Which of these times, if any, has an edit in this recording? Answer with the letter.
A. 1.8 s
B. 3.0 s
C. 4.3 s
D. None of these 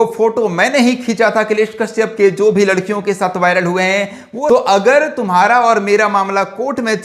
C